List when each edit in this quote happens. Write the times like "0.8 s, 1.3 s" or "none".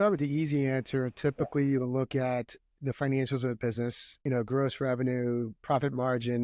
4.1 s

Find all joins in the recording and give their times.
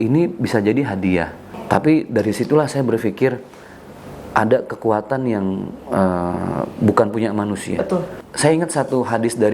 1.5 s, 8.2 s

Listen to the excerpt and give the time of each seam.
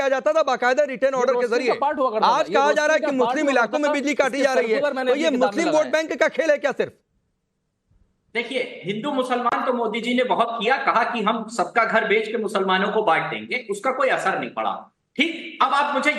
4.1 s

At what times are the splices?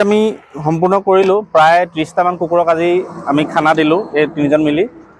none

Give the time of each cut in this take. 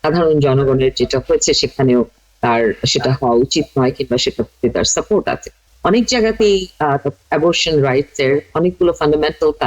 5.6 s

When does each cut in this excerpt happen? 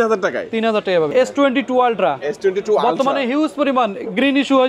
1.1 s

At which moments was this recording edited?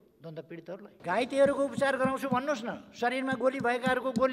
0.9 s

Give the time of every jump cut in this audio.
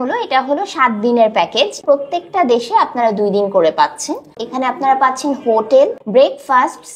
1.8 s, 4.3 s, 6.0 s

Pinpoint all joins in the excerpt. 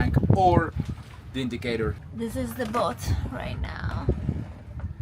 2.0 s

